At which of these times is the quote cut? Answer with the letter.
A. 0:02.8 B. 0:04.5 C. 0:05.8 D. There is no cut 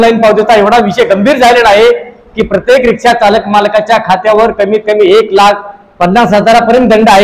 D